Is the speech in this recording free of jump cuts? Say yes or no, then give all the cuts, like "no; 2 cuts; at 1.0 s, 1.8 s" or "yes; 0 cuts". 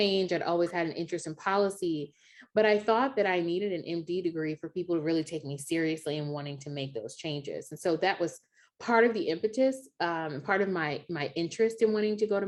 yes; 0 cuts